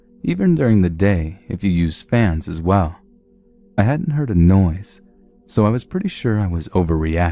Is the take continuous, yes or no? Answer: yes